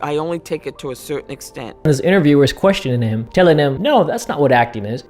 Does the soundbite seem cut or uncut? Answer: cut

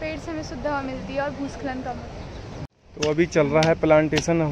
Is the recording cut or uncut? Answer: cut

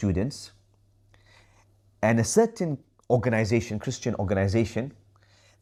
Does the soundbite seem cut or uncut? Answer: uncut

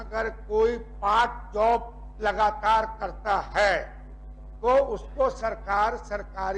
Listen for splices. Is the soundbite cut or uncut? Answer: uncut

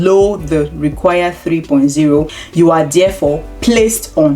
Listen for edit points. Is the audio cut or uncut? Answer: cut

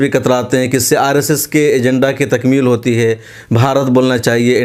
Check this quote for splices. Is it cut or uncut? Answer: uncut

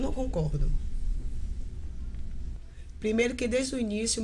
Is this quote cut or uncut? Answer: cut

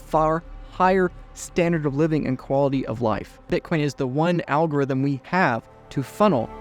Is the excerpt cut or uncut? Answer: cut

